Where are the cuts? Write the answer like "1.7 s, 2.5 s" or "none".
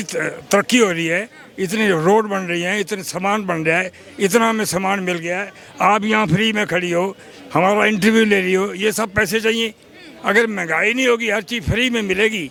none

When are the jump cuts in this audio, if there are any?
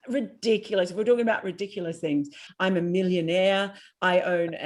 2.4 s

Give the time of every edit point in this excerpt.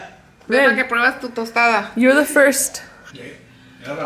3.0 s

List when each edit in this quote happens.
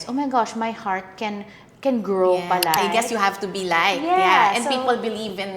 2.9 s

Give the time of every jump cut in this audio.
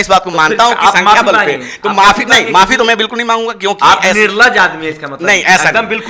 none

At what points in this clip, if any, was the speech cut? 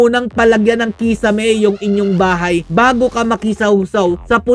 none

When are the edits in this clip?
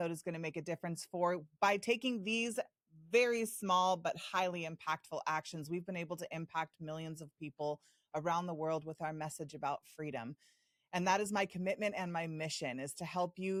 none

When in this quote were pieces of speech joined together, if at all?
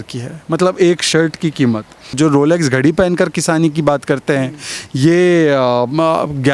2.1 s

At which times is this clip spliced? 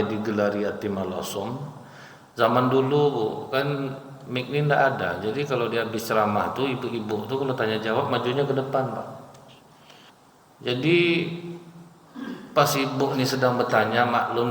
10.1 s

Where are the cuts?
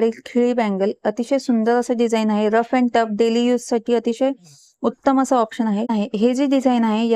5.9 s

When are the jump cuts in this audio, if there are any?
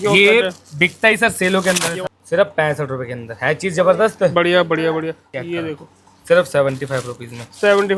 1.9 s, 5.2 s

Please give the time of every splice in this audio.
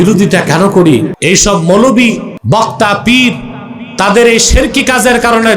1.1 s, 2.3 s

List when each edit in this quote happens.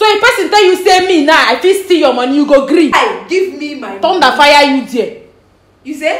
2.9 s

